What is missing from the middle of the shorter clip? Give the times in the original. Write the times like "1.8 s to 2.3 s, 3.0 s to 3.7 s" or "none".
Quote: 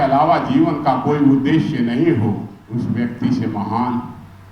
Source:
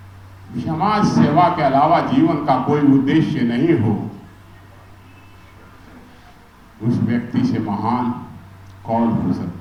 4.2 s to 6.7 s